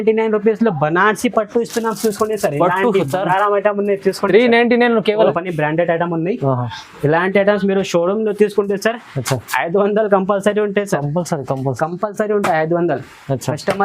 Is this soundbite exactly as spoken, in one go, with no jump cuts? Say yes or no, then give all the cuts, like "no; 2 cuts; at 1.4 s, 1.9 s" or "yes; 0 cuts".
no; 1 cut; at 5.3 s